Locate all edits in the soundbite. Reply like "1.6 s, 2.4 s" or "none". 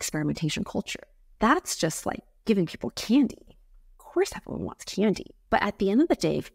1.2 s